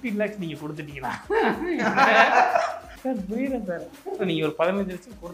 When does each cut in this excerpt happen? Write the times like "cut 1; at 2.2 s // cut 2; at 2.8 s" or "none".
cut 1; at 2.9 s